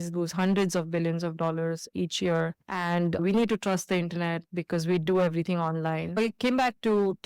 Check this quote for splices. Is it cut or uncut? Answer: cut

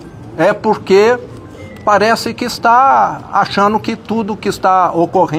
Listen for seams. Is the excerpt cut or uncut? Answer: uncut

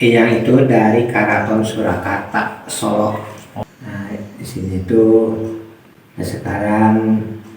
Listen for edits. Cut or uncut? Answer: cut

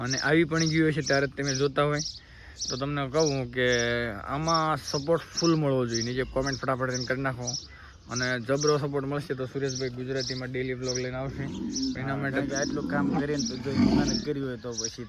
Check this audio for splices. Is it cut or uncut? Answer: uncut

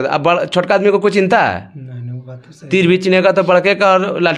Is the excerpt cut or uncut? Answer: uncut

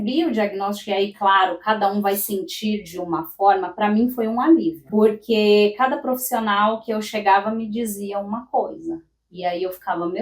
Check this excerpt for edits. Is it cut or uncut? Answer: cut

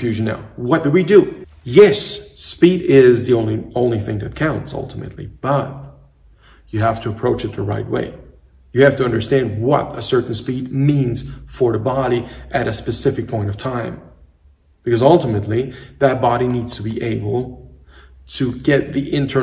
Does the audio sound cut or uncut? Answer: cut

